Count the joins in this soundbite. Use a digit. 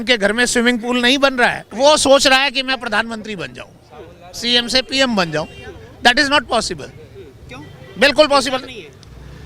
1